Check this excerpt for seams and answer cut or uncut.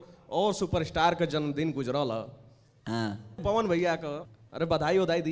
cut